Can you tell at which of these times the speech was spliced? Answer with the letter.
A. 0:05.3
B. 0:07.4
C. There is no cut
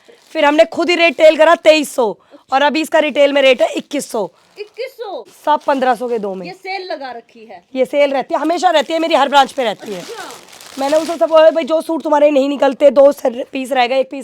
A